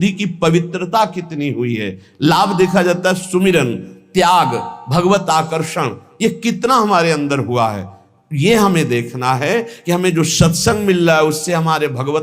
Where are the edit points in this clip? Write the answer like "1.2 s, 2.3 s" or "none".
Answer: none